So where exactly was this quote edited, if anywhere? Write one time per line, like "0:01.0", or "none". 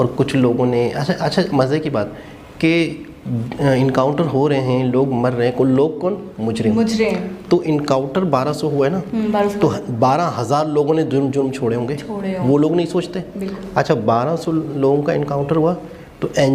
none